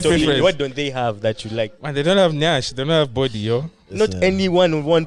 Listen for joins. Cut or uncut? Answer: cut